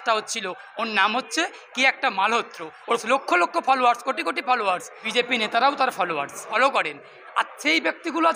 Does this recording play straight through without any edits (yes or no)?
no